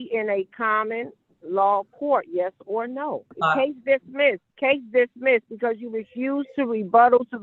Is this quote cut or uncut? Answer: cut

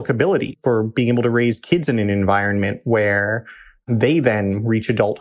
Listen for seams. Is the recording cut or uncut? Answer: uncut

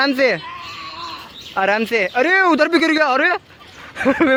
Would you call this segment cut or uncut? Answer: uncut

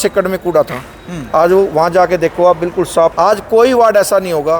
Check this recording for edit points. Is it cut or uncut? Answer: cut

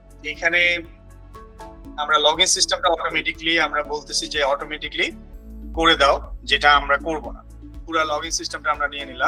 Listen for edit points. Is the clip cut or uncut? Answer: uncut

